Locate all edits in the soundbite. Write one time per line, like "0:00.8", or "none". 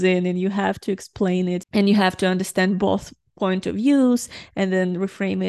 none